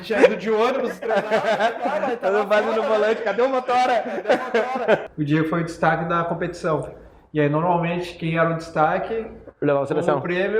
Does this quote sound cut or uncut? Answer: cut